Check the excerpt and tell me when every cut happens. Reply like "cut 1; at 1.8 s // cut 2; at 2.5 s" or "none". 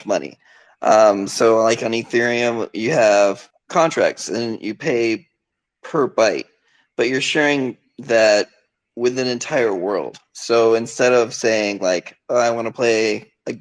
cut 1; at 3.5 s